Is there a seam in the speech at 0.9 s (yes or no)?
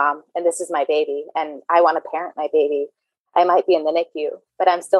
no